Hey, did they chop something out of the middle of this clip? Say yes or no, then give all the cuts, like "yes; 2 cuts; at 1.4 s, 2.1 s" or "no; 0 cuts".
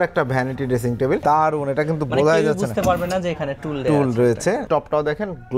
yes; 2 cuts; at 1.2 s, 4.6 s